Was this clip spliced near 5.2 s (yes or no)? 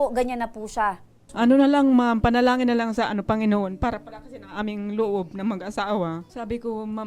no